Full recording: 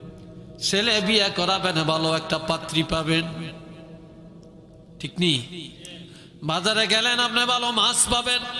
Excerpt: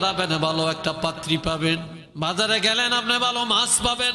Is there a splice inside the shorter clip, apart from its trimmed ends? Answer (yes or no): yes